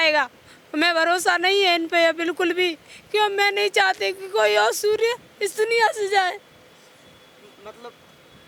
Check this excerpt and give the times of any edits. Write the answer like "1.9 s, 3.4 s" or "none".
none